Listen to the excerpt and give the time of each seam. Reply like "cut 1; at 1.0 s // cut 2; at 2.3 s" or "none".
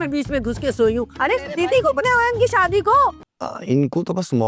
cut 1; at 3.2 s